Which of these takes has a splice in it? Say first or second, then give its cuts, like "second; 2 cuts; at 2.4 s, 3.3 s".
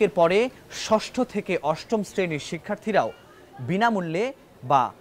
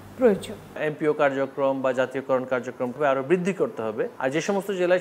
second; 3 cuts; at 0.9 s, 3.0 s, 4.1 s